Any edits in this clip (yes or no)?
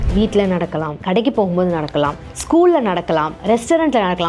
yes